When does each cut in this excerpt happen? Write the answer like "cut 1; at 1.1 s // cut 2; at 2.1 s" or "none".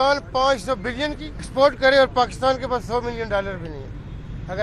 cut 1; at 1.5 s

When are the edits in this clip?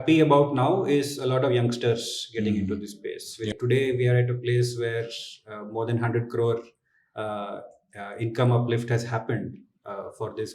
cut 1; at 3.5 s

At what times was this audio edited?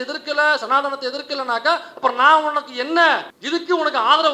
cut 1; at 3.3 s

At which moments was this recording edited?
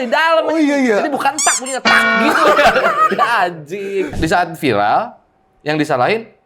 cut 1; at 4.1 s

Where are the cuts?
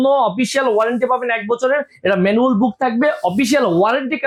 none

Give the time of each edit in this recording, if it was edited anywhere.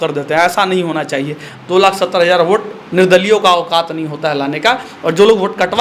cut 1; at 1.5 s

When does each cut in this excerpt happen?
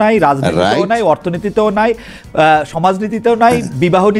none

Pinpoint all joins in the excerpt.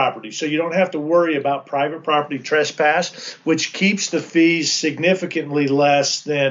none

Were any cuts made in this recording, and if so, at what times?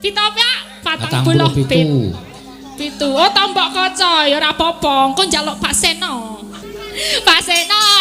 cut 1; at 6.6 s

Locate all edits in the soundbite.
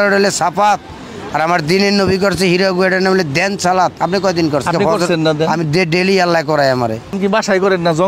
cut 1; at 4.7 s // cut 2; at 7.2 s

